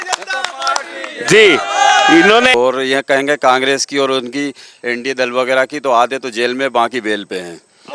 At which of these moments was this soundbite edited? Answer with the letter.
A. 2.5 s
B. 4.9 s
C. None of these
A